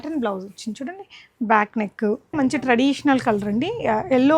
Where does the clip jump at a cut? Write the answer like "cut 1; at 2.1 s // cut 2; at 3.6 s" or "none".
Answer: cut 1; at 2.4 s